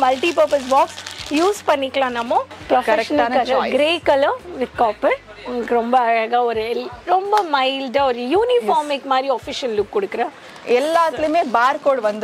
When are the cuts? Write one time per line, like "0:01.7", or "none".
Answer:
0:02.5
0:10.5